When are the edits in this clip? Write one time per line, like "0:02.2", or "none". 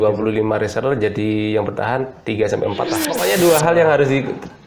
0:03.1